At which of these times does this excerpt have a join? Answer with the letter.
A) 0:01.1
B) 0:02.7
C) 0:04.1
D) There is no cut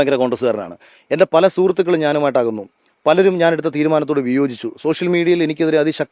D